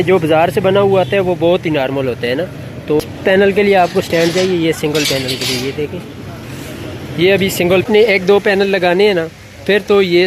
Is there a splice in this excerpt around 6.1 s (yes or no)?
no